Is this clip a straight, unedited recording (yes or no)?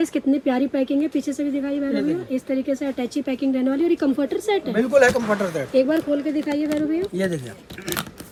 yes